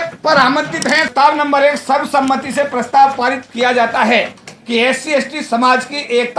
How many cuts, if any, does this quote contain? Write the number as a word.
one